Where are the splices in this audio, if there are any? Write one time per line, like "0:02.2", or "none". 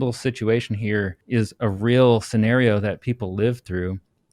0:01.2